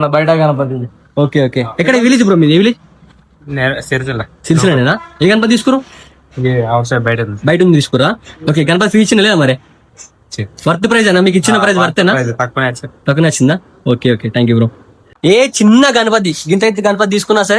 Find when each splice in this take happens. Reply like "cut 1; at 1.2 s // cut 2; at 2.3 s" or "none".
cut 1; at 15.0 s